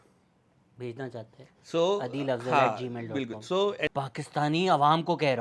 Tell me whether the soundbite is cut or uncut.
cut